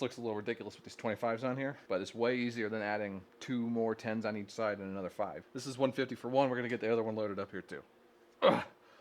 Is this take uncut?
no; 3 cuts; at 1.8 s, 3.3 s, 5.4 s

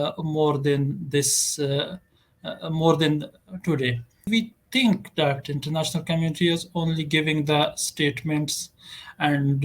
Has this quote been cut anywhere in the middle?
yes; 1 cut; at 4.3 s

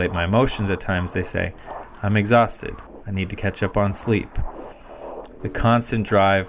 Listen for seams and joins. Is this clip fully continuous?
yes; 0 cuts

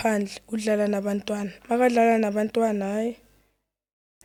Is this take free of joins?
yes; 0 cuts

